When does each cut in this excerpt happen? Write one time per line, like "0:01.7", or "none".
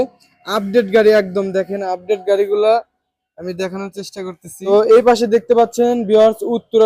0:04.7

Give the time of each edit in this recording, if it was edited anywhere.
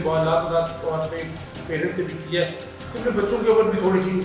none

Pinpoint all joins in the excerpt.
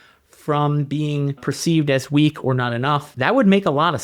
0:01.4
0:03.1

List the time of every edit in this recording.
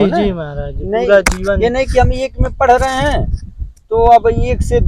none

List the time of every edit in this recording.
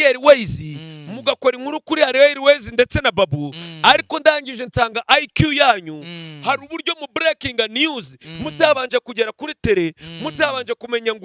none

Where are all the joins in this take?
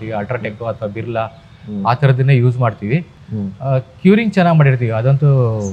none

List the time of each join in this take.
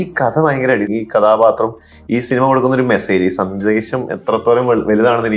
0:00.9

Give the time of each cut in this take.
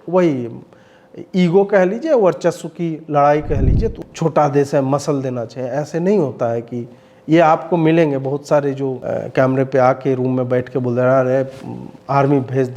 0:04.0
0:09.0

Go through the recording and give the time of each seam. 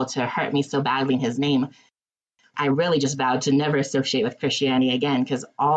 0:02.0

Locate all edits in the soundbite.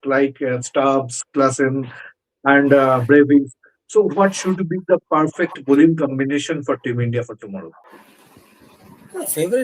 0:08.0

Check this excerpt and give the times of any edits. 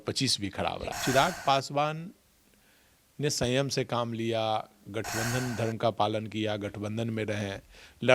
0:00.9

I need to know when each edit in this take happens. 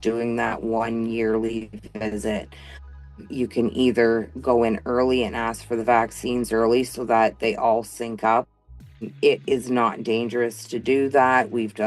0:06.5

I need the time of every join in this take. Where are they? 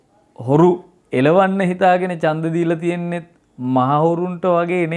none

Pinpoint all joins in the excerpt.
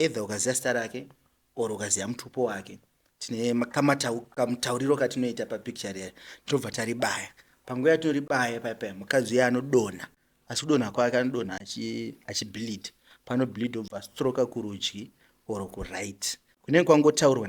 none

